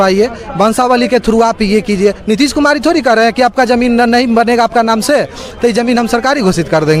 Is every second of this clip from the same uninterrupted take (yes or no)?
yes